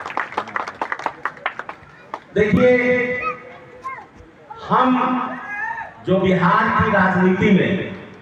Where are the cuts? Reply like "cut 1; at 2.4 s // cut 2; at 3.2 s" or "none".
cut 1; at 2.6 s // cut 2; at 5.8 s